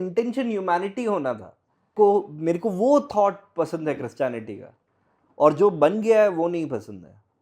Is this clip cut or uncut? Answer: cut